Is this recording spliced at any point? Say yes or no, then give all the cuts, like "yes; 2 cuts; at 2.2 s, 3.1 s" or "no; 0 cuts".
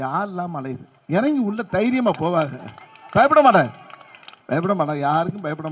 no; 0 cuts